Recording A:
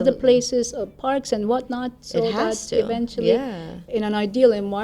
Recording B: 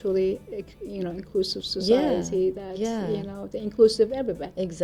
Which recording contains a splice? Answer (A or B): A